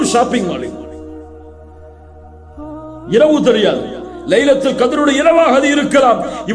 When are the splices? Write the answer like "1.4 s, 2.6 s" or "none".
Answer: none